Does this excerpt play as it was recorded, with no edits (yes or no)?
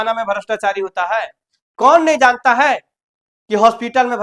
yes